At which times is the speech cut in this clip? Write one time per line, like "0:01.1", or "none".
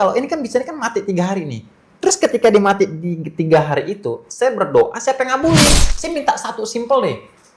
0:05.9